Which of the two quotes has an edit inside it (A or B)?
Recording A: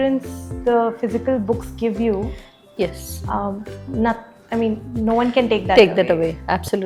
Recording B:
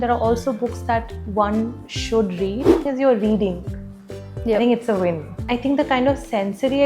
B